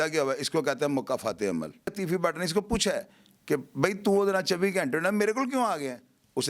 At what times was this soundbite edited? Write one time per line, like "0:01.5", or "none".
0:01.9